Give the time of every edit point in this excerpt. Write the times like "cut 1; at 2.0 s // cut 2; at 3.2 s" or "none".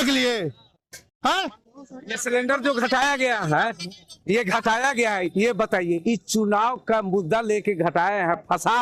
none